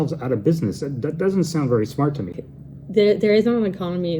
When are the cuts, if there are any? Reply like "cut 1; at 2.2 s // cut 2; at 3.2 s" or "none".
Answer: cut 1; at 2.4 s